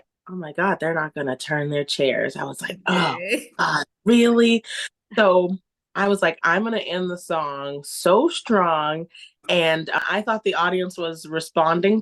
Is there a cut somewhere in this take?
yes; 1 cut; at 10.0 s

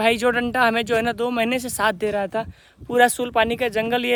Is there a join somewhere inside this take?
no; 0 cuts

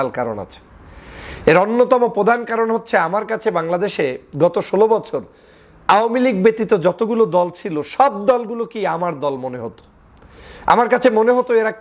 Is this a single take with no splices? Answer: yes; 0 cuts

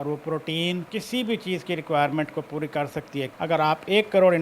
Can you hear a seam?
yes; 2 cuts; at 0.9 s, 3.3 s

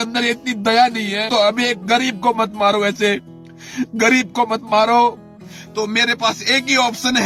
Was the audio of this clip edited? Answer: yes; 2 cuts; at 1.3 s, 5.4 s

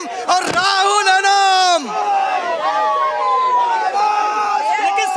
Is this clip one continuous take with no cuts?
yes; 0 cuts

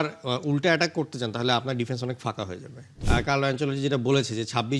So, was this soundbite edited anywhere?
yes; 1 cut; at 2.9 s

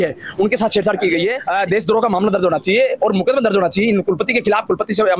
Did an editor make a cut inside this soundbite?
yes; 1 cut; at 1.4 s

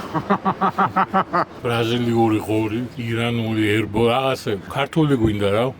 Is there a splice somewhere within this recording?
yes; 1 cut; at 1.6 s

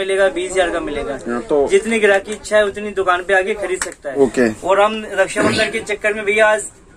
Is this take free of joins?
no; 1 cut; at 4.1 s

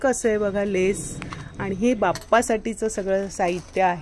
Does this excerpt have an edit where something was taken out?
no; 0 cuts

